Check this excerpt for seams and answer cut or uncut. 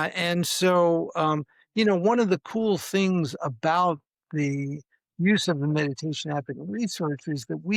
uncut